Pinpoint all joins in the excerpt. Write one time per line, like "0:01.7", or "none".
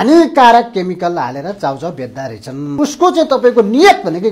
0:02.7